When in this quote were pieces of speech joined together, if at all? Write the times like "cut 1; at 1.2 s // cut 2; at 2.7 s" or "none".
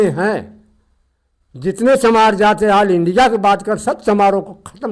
none